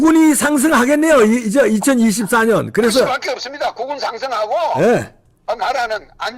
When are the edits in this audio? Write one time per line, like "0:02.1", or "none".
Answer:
none